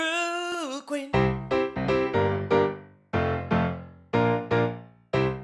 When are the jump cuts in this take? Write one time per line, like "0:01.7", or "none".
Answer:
0:01.0